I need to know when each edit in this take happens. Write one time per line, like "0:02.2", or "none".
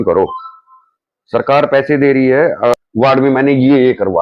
0:02.8

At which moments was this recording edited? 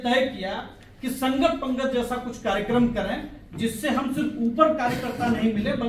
none

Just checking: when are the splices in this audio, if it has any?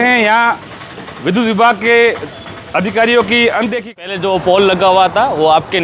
0:03.9

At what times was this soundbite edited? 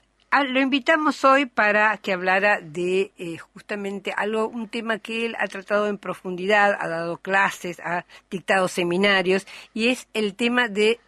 none

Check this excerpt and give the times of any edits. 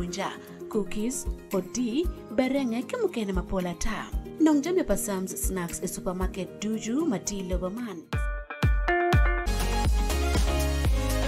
0:09.5

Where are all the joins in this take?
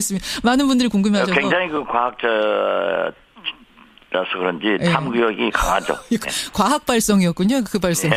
none

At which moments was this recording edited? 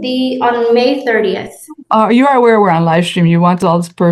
none

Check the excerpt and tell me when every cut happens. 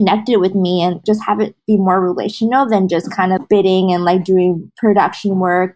0:01.0
0:03.4
0:04.7

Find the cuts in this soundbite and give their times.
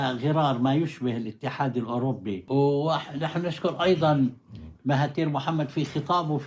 0:02.4

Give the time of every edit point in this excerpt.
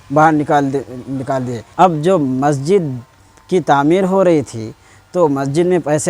0:01.6

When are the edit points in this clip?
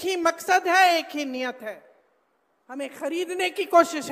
0:02.6

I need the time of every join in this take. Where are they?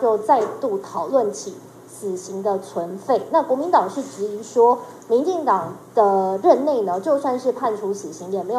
none

